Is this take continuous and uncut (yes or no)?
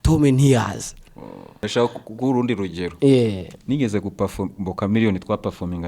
no